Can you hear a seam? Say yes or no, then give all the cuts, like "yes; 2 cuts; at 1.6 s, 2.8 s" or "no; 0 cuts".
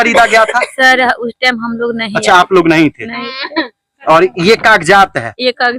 no; 0 cuts